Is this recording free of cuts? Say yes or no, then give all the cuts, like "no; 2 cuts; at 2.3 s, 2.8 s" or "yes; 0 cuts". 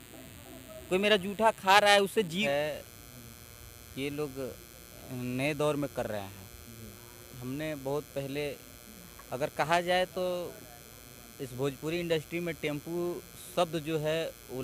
no; 1 cut; at 2.4 s